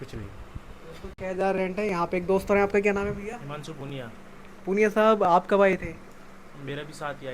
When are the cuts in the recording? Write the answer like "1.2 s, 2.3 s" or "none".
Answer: none